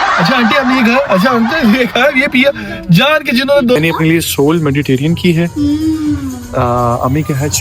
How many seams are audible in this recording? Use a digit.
1